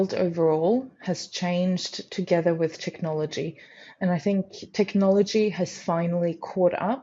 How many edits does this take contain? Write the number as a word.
zero